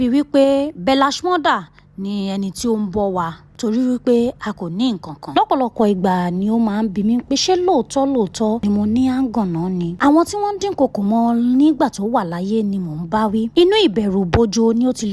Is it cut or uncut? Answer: cut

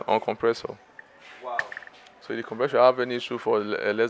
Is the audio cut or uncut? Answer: uncut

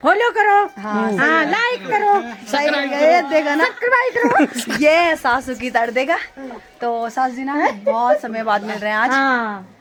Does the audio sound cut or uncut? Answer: uncut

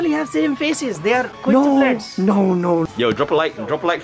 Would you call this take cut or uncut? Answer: cut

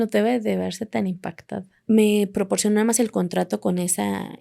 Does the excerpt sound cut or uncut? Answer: cut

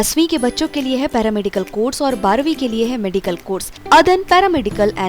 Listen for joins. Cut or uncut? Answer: cut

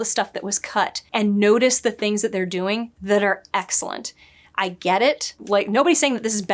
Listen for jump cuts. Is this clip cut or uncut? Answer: cut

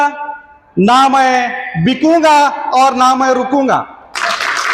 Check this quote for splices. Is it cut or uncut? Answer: uncut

